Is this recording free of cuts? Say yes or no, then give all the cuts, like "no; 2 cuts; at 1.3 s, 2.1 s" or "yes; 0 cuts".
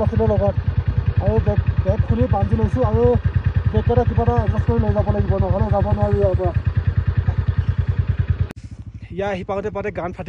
no; 1 cut; at 8.5 s